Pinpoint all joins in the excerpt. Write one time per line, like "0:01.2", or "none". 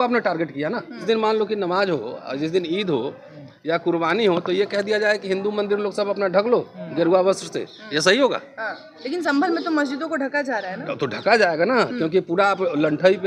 0:01.0

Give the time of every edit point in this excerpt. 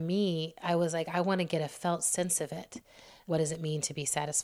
0:03.1

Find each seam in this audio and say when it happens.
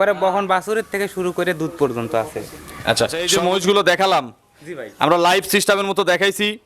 0:03.2

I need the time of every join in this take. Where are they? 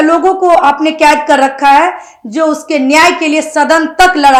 none

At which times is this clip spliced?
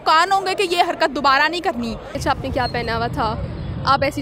0:02.1

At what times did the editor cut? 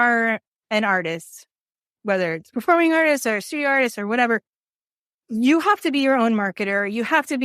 none

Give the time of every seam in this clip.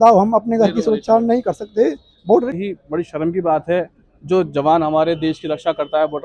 0:02.6

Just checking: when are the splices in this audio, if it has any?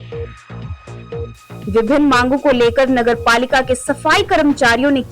0:01.6

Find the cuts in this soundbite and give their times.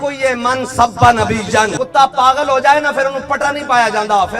0:01.7

